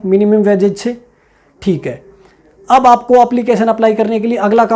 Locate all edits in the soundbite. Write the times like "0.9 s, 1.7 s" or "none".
none